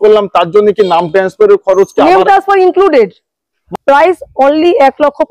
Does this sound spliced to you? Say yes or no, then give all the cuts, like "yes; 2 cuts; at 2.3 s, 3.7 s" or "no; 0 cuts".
yes; 1 cut; at 3.6 s